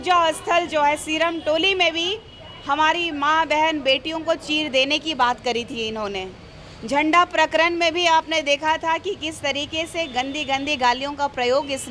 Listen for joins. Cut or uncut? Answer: uncut